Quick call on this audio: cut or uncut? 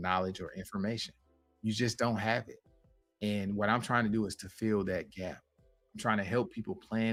uncut